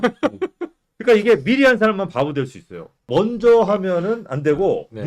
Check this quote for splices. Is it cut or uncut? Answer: cut